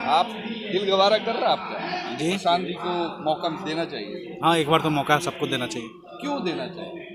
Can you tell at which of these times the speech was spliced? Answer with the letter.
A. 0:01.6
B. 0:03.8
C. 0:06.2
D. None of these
D